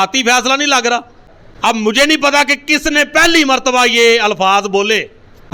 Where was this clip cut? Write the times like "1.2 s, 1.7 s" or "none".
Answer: none